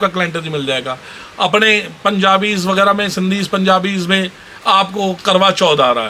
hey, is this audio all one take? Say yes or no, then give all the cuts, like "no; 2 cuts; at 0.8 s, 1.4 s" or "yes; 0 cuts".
yes; 0 cuts